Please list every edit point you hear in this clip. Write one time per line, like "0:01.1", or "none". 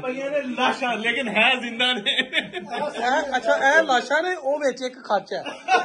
none